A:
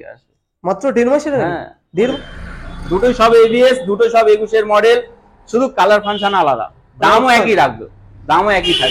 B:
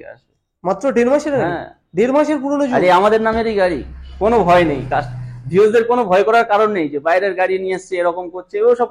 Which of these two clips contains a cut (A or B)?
A